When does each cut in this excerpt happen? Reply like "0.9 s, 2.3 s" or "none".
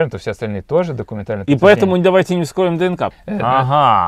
3.1 s